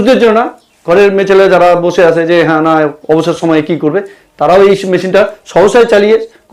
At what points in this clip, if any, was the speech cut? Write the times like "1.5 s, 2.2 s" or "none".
none